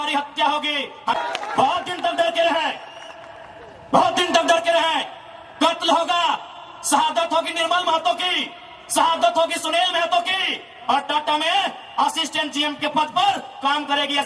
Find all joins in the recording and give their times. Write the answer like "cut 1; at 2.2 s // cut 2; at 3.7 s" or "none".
cut 1; at 1.1 s